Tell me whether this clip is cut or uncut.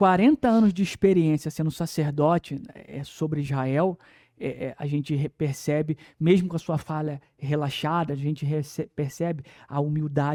uncut